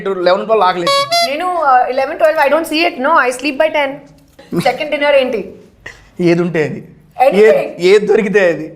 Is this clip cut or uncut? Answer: cut